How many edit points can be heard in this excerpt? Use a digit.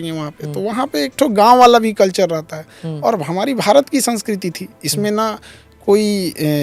0